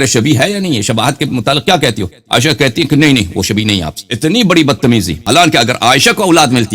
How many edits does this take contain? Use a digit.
1